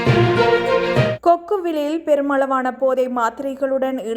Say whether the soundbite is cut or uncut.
cut